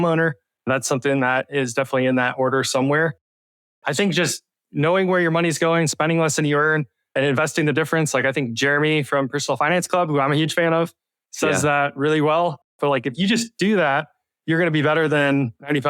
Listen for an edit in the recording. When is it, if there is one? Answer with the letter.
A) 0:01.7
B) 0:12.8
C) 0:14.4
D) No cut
B